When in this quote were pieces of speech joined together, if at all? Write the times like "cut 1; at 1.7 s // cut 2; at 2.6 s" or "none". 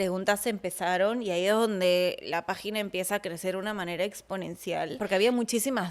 cut 1; at 4.9 s

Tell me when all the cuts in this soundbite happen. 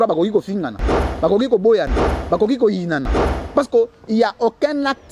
none

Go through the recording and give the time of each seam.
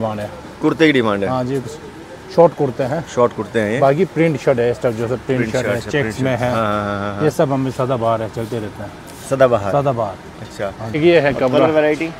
cut 1; at 11.0 s

